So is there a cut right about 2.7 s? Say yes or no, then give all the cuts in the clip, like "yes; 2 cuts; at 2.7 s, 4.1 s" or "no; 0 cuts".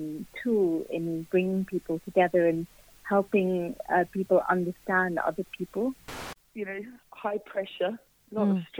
no; 1 cut; at 6.2 s